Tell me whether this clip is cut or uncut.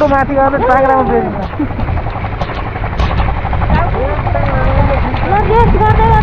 uncut